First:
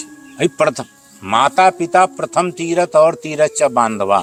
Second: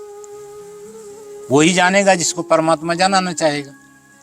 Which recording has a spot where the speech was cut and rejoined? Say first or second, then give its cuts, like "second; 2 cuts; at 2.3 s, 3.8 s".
second; 1 cut; at 1.5 s